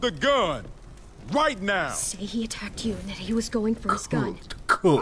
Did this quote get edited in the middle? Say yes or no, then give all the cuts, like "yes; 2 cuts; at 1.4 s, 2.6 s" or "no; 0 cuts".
no; 0 cuts